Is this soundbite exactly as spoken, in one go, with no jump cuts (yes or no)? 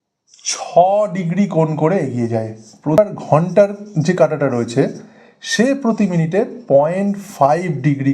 no